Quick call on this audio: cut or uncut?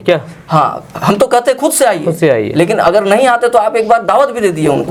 uncut